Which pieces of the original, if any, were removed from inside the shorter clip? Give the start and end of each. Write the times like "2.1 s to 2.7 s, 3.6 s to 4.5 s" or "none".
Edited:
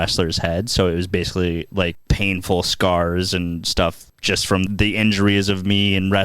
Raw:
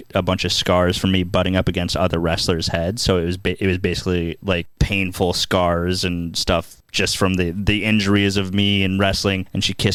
3.4 s to 3.8 s, 7.4 s to 7.5 s